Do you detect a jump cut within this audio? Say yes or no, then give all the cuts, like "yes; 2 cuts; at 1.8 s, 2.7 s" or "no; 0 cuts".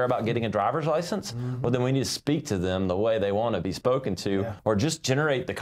yes; 1 cut; at 4.5 s